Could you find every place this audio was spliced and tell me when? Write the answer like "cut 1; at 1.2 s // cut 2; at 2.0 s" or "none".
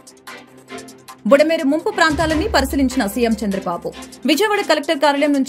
cut 1; at 1.2 s